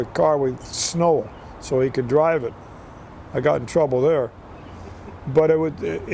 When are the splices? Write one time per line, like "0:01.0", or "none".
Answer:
none